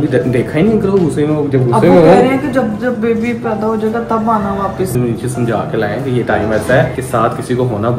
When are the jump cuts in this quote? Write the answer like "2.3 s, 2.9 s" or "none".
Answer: 4.9 s